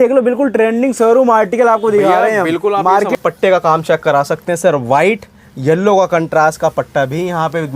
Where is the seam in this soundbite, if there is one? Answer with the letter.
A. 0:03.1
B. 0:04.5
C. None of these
A